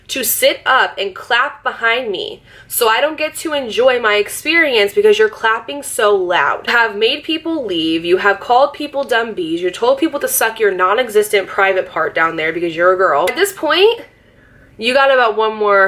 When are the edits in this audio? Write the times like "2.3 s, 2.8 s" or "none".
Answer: 6.7 s, 13.3 s